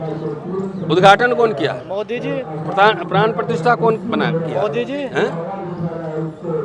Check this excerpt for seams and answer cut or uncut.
uncut